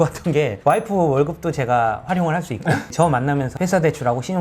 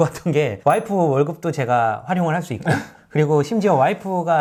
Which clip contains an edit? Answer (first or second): first